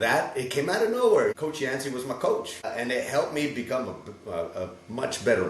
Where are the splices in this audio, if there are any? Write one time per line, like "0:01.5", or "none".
0:01.4
0:02.7